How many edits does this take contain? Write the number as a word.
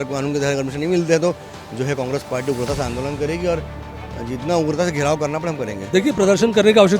one